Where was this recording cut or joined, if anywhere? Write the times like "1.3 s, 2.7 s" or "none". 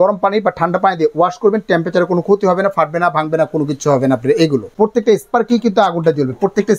4.7 s